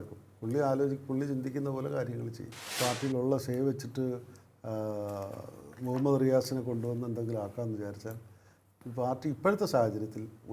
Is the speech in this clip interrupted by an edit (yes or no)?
yes